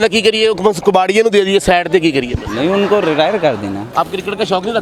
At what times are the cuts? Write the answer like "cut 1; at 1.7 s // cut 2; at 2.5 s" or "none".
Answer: cut 1; at 3.8 s